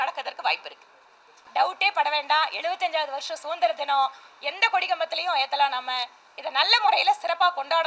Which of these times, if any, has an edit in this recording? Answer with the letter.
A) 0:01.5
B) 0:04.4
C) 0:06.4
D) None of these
A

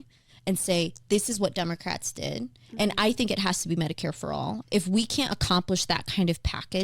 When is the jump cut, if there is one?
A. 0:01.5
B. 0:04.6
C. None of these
B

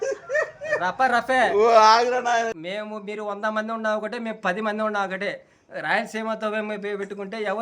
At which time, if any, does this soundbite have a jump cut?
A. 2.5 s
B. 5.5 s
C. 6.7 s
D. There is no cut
A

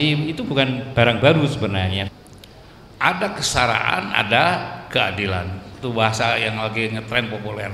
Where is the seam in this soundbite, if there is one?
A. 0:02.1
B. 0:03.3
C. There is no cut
A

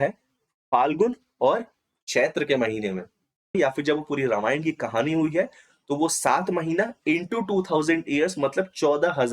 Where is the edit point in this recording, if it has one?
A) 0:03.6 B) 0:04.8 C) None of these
A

